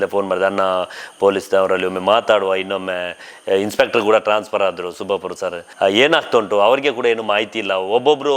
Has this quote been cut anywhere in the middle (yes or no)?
yes